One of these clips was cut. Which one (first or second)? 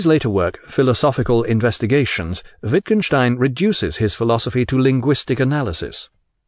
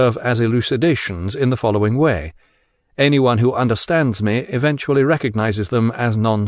second